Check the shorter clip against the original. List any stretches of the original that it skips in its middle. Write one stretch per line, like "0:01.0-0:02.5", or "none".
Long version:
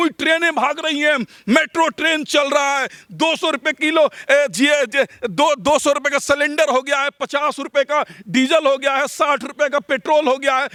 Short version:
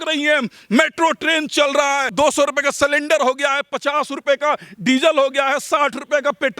0:02.9-0:05.6